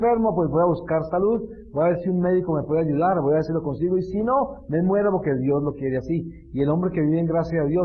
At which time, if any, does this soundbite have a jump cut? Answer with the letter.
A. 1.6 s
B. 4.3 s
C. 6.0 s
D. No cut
B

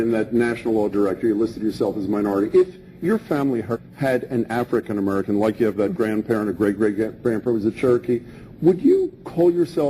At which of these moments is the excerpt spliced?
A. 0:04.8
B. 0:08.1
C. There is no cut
C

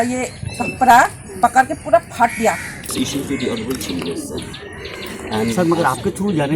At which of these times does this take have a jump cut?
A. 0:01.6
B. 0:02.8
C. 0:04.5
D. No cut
B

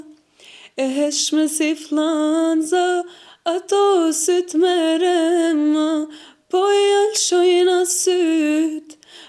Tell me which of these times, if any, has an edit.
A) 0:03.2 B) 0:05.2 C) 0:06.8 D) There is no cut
D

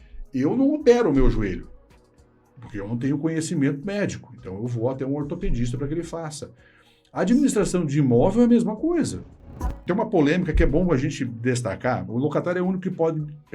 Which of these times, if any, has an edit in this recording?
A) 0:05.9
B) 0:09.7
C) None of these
B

